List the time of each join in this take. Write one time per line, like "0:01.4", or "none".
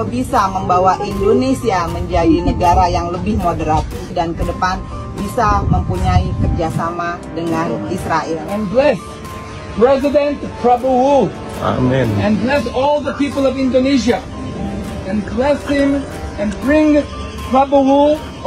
0:04.1